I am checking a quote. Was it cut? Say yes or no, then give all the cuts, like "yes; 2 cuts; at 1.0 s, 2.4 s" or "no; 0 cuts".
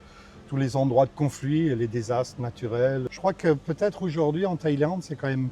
yes; 1 cut; at 3.1 s